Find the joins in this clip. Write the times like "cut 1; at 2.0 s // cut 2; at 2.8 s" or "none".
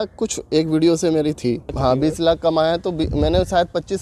cut 1; at 1.7 s